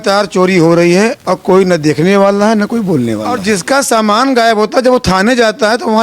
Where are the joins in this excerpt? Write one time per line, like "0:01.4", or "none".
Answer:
0:03.3